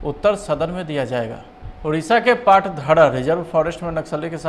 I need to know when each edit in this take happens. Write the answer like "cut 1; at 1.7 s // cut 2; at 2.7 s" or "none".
cut 1; at 1.8 s